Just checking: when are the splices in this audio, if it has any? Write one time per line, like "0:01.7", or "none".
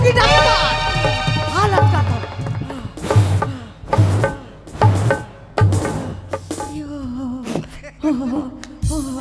none